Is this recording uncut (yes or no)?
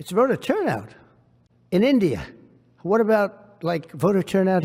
yes